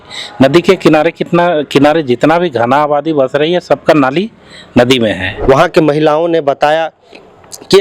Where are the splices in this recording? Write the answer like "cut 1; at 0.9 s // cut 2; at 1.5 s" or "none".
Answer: cut 1; at 5.3 s